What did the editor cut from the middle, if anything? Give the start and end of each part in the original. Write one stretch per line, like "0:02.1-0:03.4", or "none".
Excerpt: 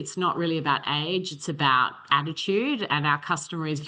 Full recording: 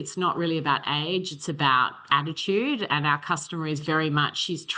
none